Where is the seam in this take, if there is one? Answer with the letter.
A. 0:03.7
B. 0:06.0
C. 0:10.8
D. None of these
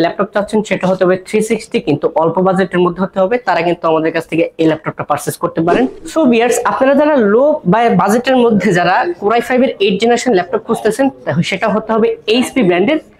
B